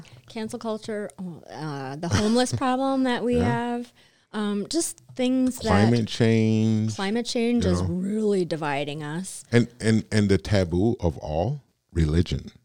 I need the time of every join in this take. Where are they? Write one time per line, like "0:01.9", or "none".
0:11.7